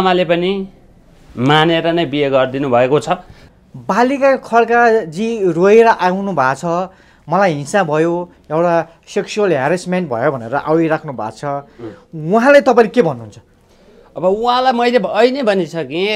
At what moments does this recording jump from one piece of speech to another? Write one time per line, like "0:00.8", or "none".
0:03.4